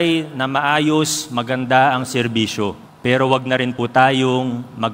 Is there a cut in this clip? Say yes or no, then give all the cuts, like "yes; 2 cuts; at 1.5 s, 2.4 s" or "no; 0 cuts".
yes; 1 cut; at 2.9 s